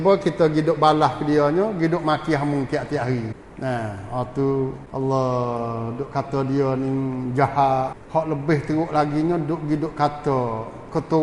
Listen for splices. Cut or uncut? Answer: cut